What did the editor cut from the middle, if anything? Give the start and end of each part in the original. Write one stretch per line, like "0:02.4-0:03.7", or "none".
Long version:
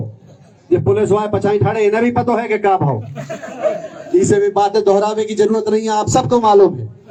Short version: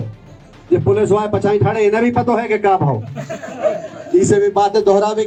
none